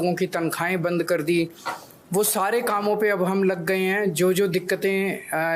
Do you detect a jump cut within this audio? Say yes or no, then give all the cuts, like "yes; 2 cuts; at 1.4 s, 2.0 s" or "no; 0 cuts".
no; 0 cuts